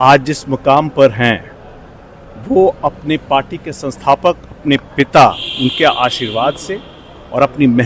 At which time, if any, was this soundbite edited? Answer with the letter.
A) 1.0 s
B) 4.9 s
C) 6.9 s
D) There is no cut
D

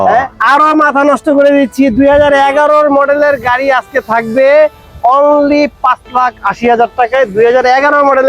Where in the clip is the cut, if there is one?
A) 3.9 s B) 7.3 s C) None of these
C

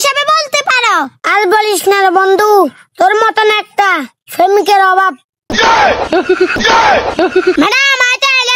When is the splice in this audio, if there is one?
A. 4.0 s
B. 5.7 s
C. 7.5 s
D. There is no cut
C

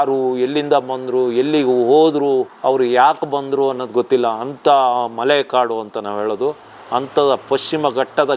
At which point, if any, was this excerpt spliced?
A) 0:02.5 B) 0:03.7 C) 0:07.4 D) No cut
A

